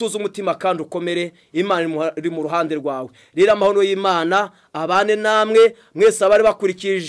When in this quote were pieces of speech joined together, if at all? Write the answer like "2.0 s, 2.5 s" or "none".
none